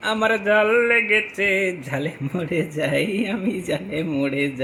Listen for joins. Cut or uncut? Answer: uncut